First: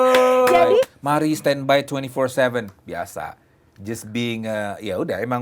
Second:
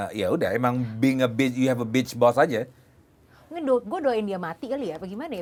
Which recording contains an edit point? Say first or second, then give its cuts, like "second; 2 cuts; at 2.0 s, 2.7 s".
first; 1 cut; at 1.0 s